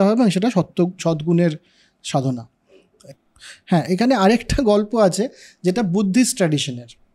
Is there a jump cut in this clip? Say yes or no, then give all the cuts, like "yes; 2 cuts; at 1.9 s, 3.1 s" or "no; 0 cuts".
no; 0 cuts